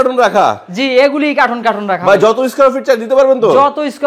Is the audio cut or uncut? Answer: uncut